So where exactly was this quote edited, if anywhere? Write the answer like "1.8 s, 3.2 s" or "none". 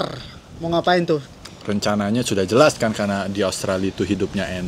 1.4 s